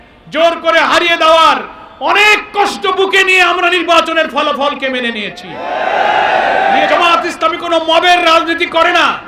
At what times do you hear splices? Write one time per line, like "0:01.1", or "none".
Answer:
0:06.6